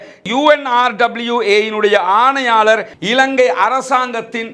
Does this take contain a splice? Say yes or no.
yes